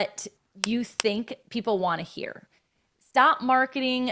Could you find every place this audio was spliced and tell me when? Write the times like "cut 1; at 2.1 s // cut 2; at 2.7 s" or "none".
none

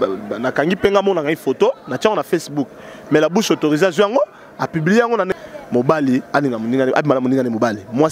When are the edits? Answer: cut 1; at 5.3 s

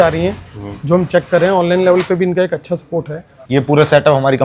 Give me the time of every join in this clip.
cut 1; at 3.4 s

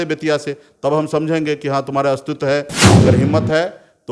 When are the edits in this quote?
cut 1; at 2.8 s

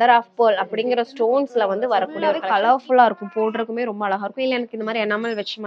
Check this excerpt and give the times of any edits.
cut 1; at 2.4 s

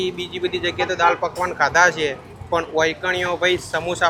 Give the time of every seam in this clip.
none

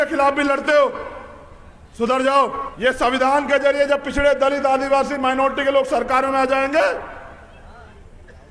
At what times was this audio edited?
cut 1; at 2.7 s

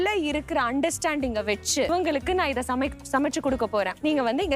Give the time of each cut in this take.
none

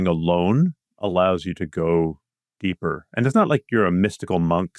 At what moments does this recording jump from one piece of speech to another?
none

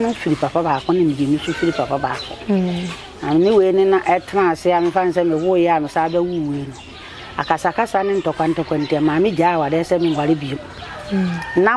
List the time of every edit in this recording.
none

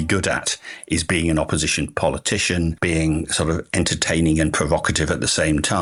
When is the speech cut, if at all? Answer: none

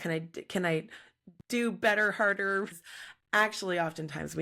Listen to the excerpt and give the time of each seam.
cut 1; at 2.7 s

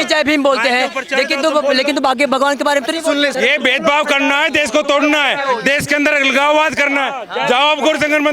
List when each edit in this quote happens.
cut 1; at 3.3 s

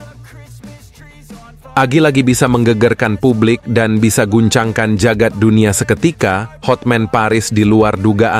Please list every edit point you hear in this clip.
cut 1; at 1.7 s

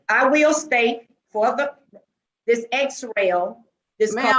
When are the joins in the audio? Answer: none

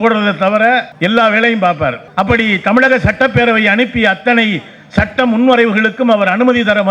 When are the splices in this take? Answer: none

